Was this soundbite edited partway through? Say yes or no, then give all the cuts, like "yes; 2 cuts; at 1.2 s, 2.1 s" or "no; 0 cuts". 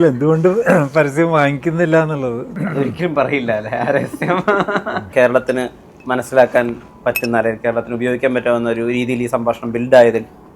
yes; 2 cuts; at 2.5 s, 5.1 s